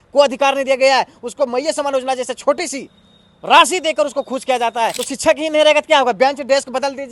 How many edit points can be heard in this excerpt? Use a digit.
1